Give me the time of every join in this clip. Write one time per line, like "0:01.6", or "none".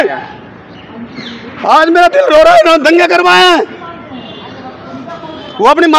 none